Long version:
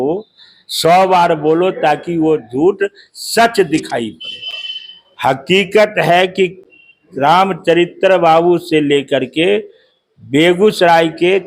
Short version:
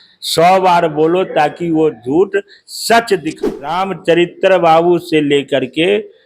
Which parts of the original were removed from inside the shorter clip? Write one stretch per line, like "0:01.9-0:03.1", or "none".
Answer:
0:04.3-0:07.4